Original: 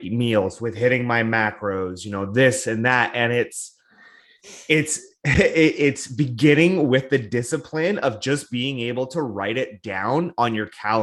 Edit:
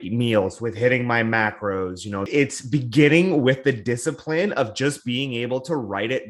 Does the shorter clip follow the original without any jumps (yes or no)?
no